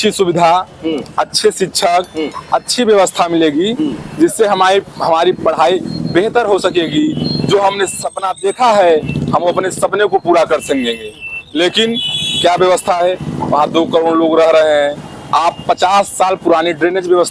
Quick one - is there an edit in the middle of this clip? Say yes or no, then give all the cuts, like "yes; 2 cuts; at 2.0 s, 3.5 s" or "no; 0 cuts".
no; 0 cuts